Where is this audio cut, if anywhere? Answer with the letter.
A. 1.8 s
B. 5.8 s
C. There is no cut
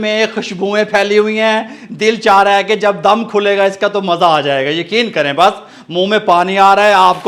C